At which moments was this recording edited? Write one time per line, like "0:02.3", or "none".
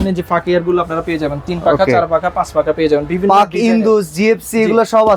none

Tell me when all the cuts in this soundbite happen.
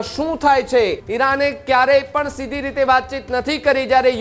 0:01.0

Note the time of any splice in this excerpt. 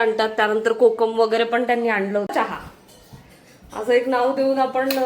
0:02.3

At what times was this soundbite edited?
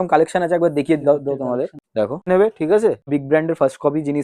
0:02.3
0:03.1

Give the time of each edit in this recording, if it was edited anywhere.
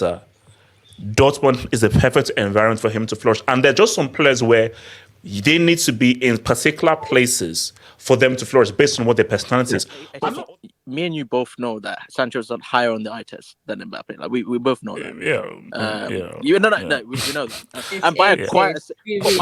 0:10.1

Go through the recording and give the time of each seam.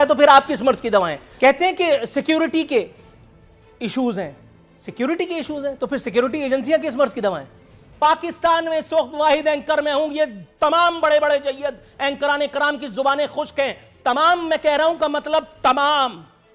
0:01.2
0:07.8

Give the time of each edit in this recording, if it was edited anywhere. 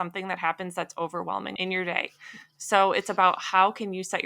0:01.5

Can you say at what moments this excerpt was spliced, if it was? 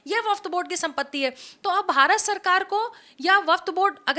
none

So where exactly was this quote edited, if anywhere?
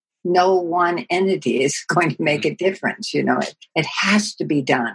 0:03.6

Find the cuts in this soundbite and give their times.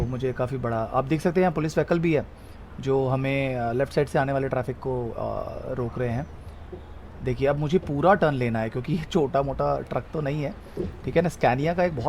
none

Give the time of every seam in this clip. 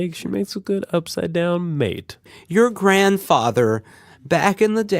0:02.2

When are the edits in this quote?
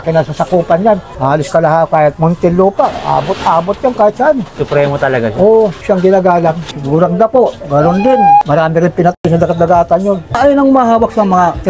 0:04.5
0:05.8
0:06.7
0:08.4
0:10.3

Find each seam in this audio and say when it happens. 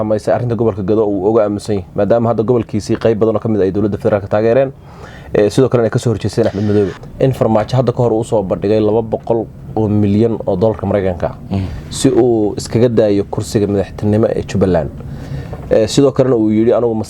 0:07.0

